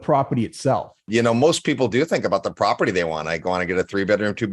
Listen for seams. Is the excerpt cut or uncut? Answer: cut